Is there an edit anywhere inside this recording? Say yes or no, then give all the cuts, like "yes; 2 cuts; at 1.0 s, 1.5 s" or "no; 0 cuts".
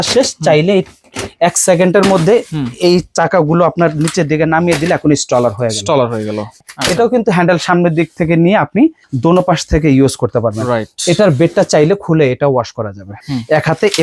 yes; 3 cuts; at 6.6 s, 9.1 s, 13.2 s